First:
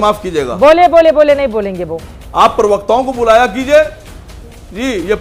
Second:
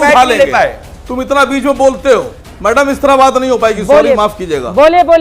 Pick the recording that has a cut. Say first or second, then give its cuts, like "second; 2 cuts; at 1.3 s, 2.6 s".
second; 1 cut; at 2.4 s